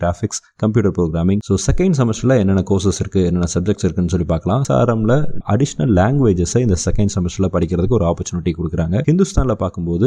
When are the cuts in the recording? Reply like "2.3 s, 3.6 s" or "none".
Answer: 1.4 s, 4.6 s